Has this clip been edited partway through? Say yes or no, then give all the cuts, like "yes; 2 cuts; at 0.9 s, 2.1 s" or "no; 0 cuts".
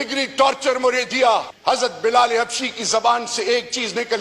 yes; 1 cut; at 1.5 s